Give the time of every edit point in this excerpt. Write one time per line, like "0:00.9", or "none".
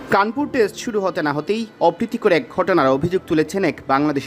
none

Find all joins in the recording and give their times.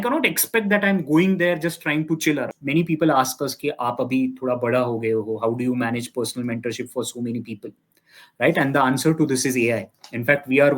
0:02.5

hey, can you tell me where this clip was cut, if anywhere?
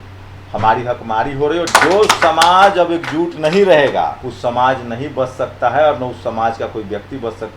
0:01.7
0:04.3

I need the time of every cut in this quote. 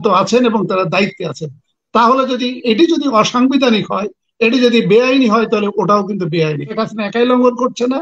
0:06.7

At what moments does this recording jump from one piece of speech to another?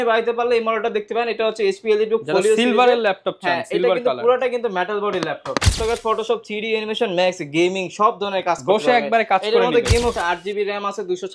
0:05.8
0:10.1

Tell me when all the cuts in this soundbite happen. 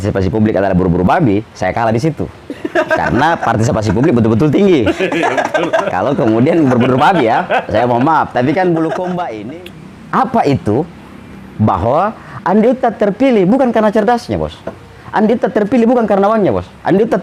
0:09.4

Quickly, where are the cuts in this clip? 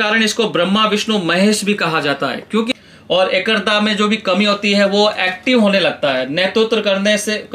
0:02.7

